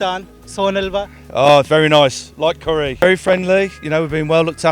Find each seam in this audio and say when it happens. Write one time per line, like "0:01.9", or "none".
0:02.9